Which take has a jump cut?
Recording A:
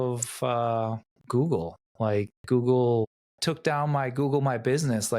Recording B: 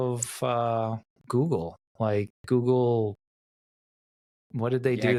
A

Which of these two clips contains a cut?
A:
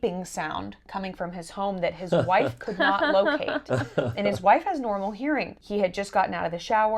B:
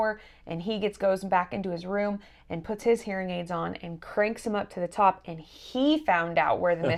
A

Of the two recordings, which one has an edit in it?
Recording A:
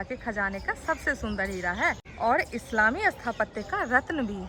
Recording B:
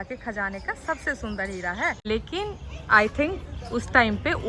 B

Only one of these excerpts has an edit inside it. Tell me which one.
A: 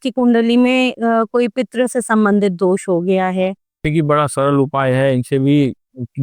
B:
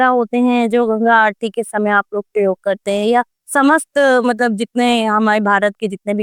A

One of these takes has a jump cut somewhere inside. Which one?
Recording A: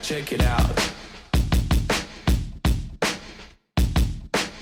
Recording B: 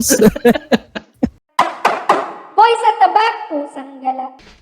B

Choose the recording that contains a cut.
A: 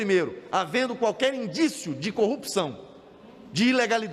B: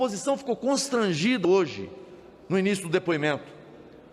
B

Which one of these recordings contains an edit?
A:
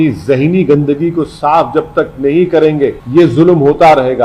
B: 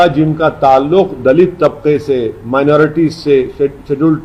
A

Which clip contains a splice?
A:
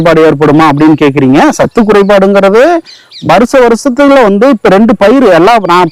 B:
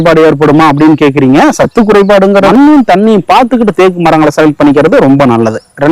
B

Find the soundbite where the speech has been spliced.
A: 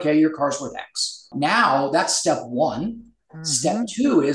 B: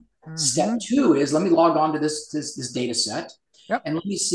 A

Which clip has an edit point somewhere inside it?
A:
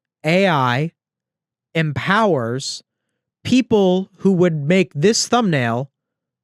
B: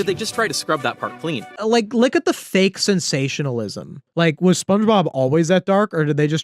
B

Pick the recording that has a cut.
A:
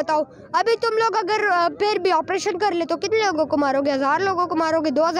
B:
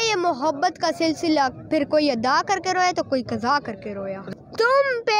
B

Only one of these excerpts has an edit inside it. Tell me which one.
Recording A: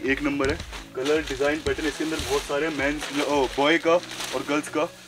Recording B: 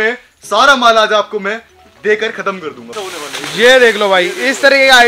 B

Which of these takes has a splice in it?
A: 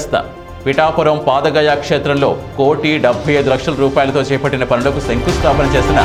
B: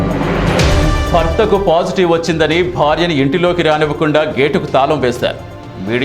B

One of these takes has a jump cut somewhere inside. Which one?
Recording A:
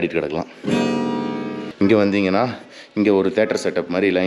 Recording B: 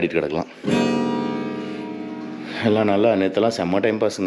A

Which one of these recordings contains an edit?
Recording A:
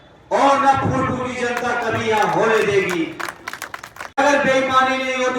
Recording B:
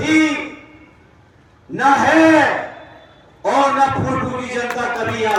A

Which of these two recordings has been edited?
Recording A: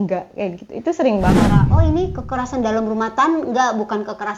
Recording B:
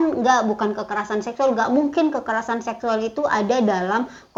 A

